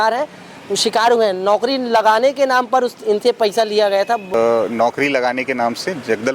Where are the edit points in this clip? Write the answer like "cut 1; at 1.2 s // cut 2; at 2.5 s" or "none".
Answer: cut 1; at 4.3 s